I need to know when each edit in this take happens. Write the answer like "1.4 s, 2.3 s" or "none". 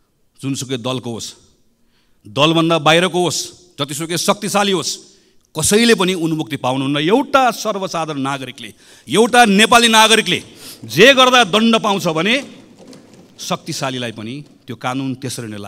none